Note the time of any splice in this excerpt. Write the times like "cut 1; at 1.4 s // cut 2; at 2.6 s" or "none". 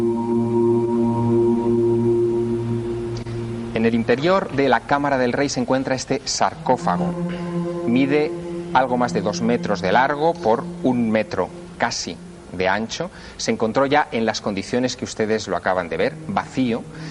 cut 1; at 9.2 s